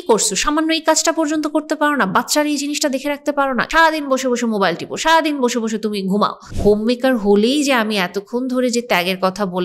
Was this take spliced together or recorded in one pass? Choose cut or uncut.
cut